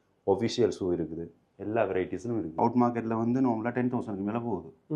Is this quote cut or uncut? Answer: cut